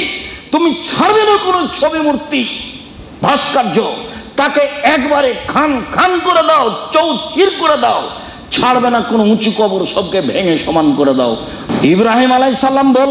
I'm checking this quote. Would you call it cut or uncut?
cut